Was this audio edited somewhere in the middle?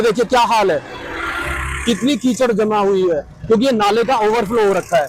no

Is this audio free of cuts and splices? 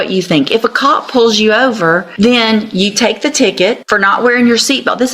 no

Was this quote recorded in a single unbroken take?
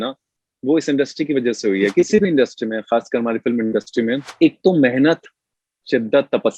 no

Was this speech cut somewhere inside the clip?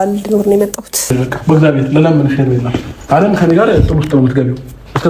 yes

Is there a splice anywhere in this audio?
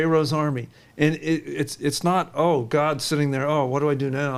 no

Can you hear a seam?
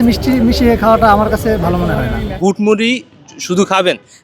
yes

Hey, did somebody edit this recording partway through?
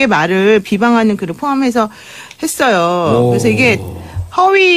no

